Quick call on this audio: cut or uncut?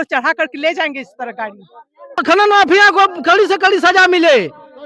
cut